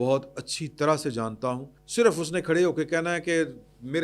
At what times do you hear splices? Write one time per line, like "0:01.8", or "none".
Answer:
0:01.7